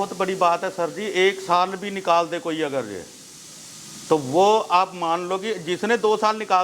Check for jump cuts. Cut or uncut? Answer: uncut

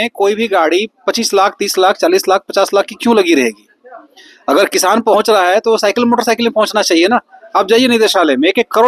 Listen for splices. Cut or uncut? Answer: uncut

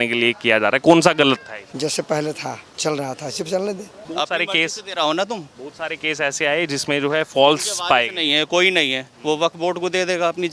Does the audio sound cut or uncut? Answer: cut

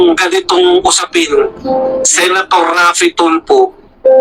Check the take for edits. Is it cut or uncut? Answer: uncut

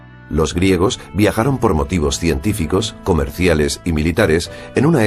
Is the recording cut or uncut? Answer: uncut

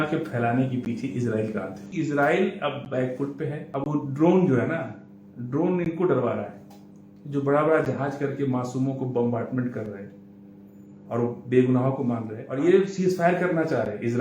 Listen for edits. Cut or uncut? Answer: cut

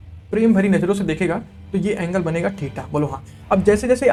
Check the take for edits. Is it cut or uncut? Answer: uncut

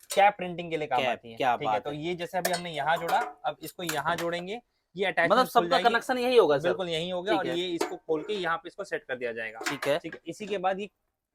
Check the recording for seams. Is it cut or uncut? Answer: uncut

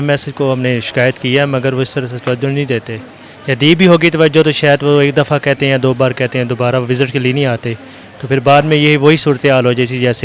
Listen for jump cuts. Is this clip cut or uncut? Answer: uncut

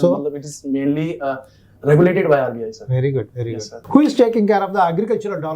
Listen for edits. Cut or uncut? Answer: cut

